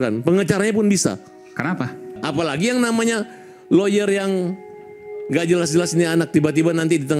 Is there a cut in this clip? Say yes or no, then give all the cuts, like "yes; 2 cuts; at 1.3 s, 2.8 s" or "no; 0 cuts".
no; 0 cuts